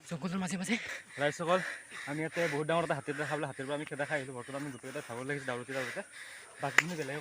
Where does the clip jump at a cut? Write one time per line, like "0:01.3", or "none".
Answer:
0:01.0